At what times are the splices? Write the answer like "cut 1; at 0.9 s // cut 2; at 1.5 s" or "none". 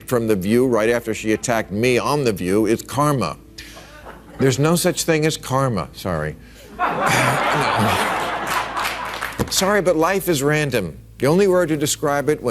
none